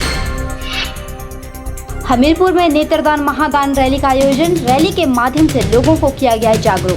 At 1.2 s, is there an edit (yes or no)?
yes